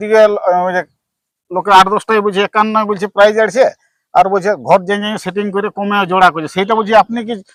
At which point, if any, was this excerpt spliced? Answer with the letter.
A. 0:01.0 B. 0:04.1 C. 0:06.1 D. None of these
D